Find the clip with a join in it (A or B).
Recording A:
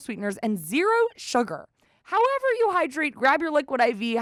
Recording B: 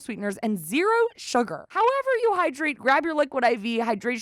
B